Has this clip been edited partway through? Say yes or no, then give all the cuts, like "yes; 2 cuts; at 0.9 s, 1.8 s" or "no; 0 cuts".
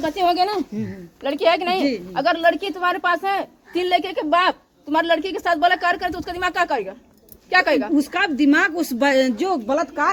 no; 0 cuts